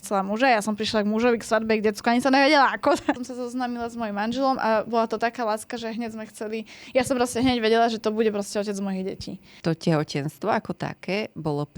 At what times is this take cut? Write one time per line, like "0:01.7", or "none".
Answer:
0:09.5

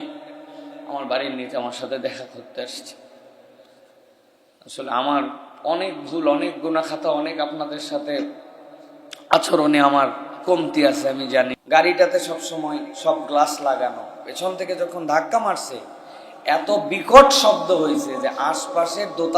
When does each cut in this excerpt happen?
0:11.6

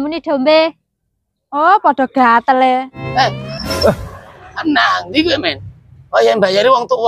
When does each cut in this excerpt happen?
0:03.0

